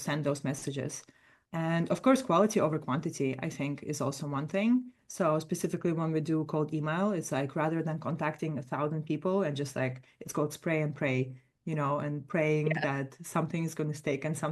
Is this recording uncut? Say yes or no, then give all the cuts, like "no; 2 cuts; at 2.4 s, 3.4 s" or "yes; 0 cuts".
yes; 0 cuts